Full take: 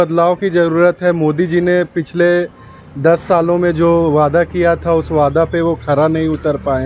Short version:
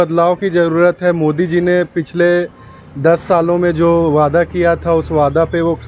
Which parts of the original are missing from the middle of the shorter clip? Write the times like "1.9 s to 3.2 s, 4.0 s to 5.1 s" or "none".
none